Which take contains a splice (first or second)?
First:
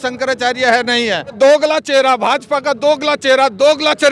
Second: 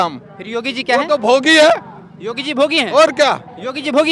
first